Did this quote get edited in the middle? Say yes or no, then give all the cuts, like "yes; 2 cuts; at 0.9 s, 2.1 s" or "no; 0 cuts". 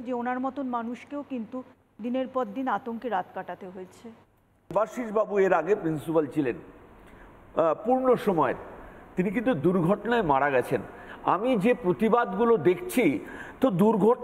yes; 1 cut; at 4.7 s